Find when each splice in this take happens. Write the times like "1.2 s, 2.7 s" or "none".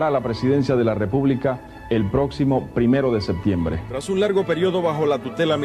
3.9 s